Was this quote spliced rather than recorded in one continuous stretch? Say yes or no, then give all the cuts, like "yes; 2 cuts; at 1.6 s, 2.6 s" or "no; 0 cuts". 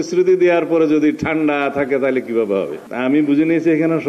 yes; 1 cut; at 2.8 s